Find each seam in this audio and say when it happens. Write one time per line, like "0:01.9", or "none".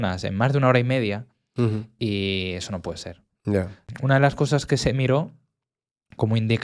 0:03.8